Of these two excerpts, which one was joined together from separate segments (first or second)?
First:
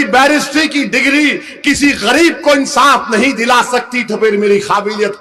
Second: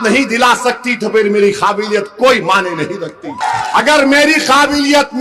second